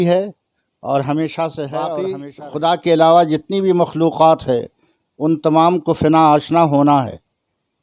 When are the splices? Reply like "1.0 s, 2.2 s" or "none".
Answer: 2.2 s